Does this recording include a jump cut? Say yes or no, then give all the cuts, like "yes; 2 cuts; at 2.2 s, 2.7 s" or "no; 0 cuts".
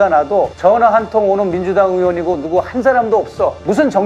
no; 0 cuts